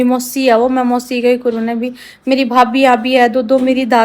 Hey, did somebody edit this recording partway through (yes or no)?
no